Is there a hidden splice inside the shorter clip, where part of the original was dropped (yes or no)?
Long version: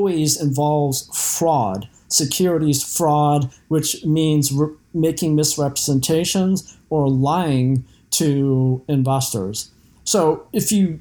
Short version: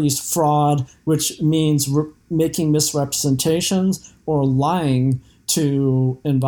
no